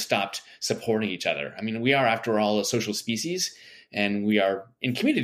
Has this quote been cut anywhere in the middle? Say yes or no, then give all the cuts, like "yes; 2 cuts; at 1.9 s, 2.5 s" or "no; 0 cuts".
no; 0 cuts